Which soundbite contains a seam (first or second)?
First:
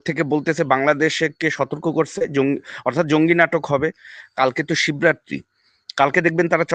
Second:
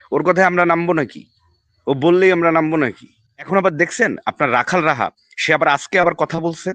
second